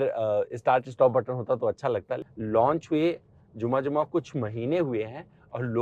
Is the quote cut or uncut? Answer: cut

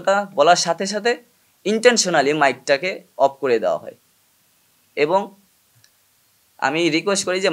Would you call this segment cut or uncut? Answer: uncut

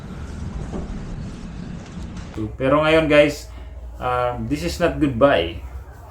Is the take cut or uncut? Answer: cut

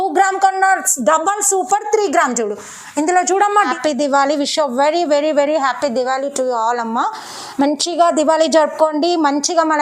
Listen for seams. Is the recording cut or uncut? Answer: cut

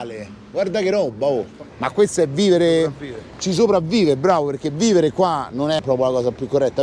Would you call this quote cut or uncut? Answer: cut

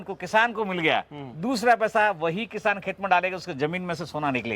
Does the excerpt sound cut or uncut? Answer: uncut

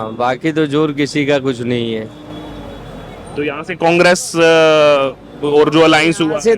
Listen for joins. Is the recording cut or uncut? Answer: uncut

